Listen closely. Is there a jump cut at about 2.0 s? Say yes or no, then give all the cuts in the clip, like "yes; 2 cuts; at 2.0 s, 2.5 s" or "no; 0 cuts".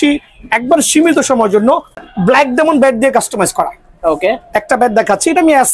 yes; 1 cut; at 2.0 s